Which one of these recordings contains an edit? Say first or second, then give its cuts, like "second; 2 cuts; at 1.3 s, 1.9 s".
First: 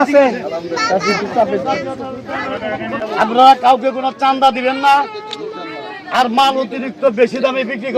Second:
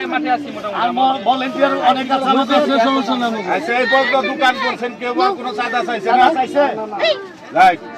first; 1 cut; at 3.0 s